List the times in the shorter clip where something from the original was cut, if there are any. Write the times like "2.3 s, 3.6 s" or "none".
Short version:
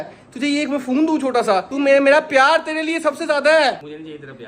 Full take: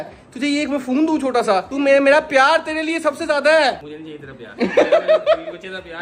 none